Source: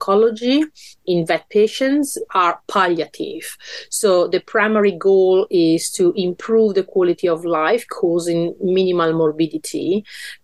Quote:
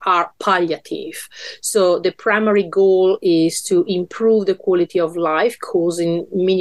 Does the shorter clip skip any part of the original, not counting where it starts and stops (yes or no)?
no